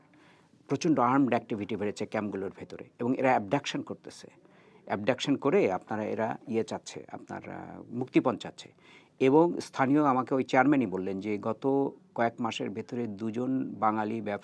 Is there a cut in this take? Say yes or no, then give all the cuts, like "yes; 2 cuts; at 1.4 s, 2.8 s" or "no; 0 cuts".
no; 0 cuts